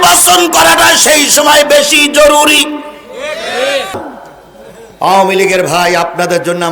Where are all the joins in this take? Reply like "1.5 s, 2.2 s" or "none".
4.0 s